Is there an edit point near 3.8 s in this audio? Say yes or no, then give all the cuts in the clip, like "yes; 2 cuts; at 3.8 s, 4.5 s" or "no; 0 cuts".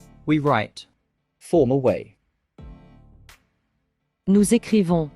yes; 2 cuts; at 2.2 s, 3.8 s